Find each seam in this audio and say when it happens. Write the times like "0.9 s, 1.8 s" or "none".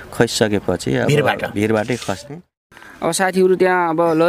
2.7 s